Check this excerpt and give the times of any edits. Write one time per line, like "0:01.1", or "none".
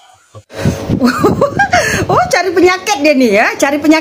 none